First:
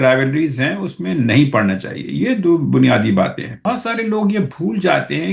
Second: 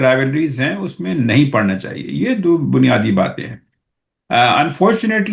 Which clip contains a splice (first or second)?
first